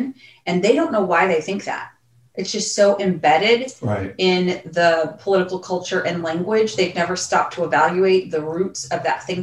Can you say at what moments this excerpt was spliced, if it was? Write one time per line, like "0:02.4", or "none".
none